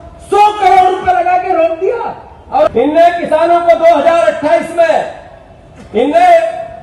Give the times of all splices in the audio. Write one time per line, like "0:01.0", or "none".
0:02.7